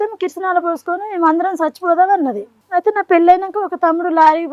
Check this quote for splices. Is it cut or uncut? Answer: cut